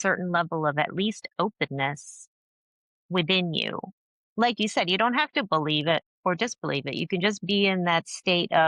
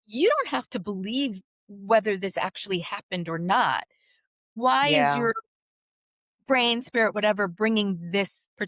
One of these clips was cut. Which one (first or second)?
second